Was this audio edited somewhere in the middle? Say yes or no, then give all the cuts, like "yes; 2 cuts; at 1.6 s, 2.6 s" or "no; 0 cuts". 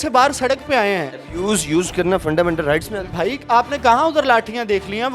yes; 1 cut; at 3.1 s